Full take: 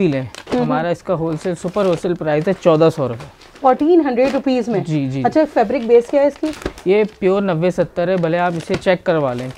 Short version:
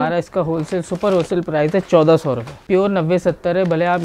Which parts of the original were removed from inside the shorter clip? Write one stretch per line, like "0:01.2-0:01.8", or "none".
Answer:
0:03.3-0:07.1